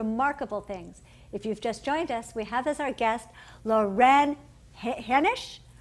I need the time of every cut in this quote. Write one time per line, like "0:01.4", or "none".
0:01.2